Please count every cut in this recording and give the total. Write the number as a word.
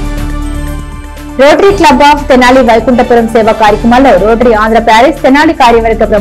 one